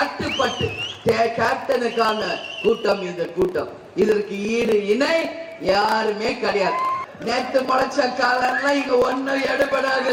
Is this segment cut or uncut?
cut